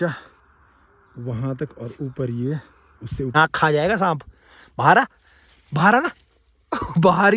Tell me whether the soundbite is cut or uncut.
cut